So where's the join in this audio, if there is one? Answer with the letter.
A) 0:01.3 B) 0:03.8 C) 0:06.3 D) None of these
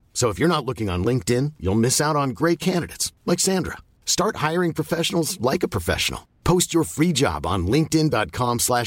D